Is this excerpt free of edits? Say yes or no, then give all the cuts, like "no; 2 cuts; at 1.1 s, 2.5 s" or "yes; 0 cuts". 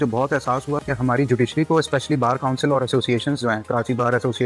yes; 0 cuts